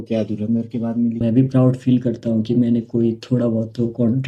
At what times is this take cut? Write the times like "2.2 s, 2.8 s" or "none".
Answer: 1.2 s